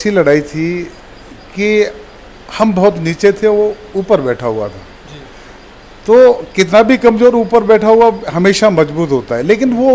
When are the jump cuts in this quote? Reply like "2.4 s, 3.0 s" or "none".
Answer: none